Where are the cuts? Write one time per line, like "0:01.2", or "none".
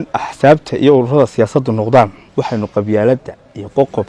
0:02.2